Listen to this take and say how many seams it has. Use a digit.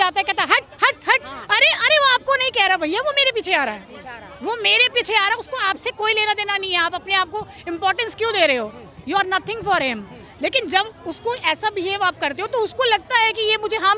0